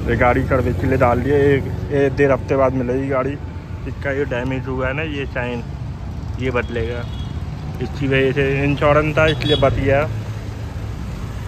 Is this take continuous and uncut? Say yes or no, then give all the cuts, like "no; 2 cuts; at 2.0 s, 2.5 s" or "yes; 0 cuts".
yes; 0 cuts